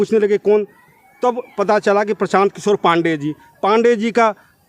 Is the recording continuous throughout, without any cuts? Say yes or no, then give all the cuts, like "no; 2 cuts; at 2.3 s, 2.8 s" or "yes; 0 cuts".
yes; 0 cuts